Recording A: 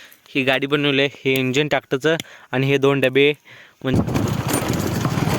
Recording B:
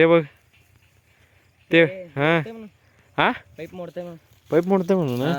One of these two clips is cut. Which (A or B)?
A